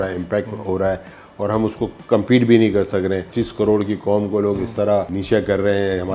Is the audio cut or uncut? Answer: cut